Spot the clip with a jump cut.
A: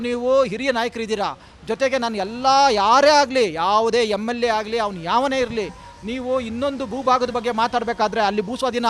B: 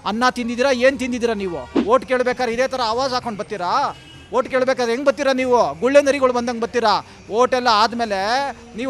B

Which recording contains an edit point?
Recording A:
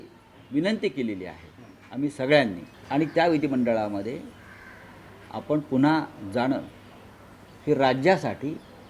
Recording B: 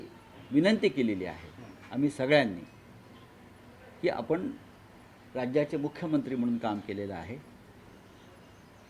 A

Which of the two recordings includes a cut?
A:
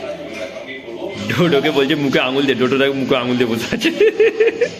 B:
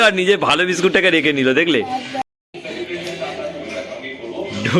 B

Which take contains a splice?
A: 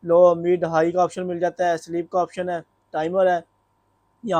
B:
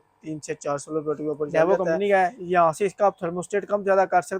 B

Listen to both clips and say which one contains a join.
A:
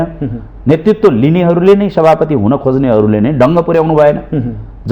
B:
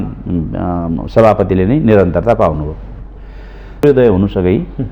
B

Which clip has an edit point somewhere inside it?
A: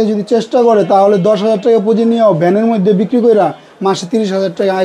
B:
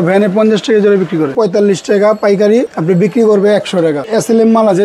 B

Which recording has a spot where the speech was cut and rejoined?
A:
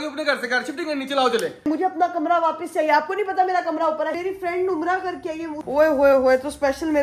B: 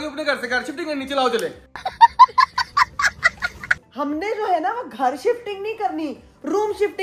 A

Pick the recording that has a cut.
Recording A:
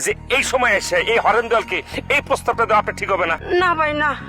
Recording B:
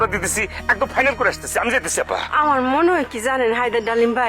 A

